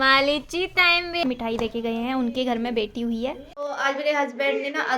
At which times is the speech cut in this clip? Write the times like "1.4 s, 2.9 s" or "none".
1.2 s, 3.5 s